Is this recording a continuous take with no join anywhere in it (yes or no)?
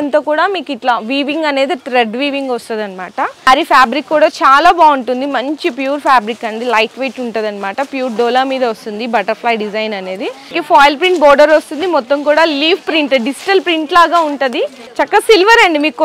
no